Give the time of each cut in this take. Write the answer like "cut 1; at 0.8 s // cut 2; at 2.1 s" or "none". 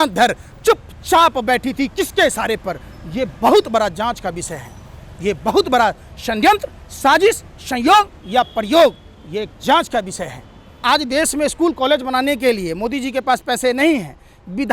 cut 1; at 10.7 s